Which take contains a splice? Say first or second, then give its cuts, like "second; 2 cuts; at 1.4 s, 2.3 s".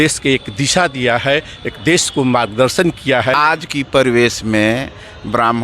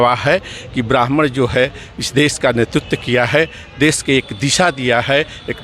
first; 1 cut; at 3.3 s